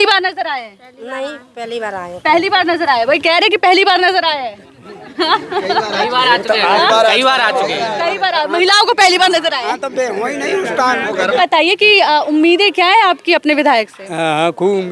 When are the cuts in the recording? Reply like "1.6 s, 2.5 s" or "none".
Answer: 11.4 s